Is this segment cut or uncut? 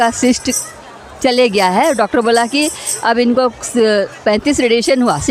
uncut